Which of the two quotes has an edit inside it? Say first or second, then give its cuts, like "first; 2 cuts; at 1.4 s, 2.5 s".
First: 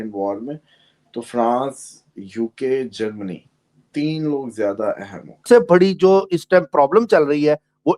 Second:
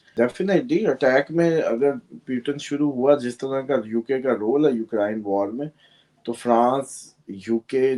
first; 1 cut; at 5.4 s